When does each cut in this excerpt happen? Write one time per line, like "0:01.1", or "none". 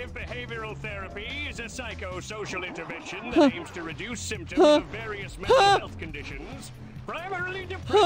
none